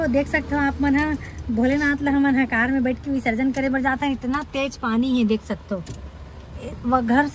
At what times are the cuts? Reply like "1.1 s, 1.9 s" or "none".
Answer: none